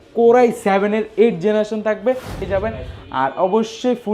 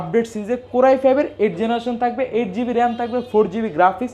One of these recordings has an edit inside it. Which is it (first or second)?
first